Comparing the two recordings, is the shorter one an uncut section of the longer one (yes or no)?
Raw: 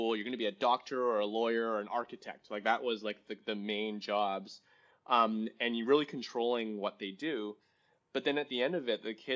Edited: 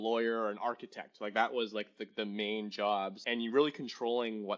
no